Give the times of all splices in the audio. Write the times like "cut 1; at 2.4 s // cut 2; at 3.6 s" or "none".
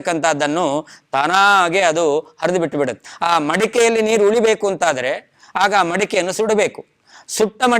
cut 1; at 3.1 s